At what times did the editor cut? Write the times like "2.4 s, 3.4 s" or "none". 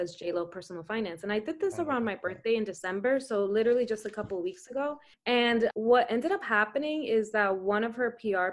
5.5 s